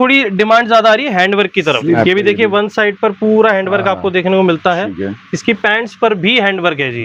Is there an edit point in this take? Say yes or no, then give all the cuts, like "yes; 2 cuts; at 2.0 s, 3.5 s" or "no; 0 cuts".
yes; 1 cut; at 2.0 s